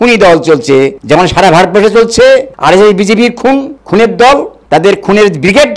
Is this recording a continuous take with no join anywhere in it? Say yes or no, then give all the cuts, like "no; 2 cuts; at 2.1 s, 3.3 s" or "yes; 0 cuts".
no; 3 cuts; at 1.0 s, 2.5 s, 3.8 s